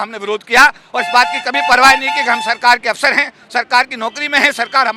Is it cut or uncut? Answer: uncut